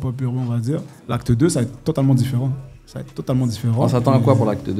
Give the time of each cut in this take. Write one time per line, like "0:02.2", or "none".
0:00.9

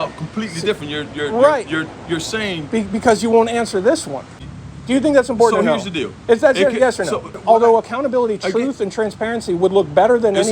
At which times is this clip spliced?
0:04.4
0:07.3

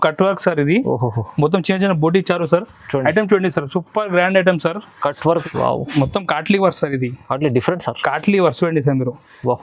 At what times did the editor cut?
0:05.4

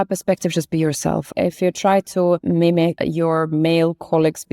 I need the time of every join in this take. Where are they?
0:01.3
0:02.7

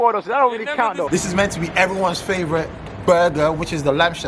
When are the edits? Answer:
0:01.1

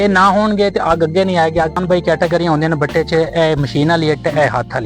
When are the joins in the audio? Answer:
0:01.8

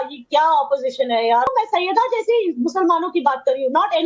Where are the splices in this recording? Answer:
0:01.5

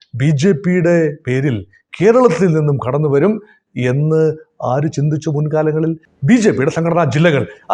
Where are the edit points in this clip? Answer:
0:06.1

